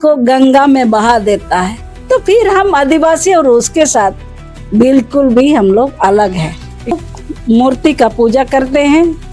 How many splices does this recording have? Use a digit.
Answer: 1